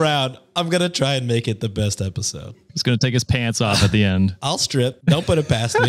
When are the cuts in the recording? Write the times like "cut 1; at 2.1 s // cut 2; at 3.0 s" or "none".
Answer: cut 1; at 2.8 s // cut 2; at 4.7 s